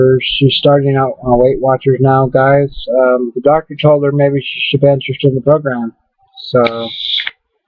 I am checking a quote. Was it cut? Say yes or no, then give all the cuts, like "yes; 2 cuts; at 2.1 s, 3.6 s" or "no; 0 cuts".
no; 0 cuts